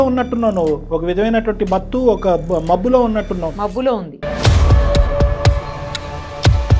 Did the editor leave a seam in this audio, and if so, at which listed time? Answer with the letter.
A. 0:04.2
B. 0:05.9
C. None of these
C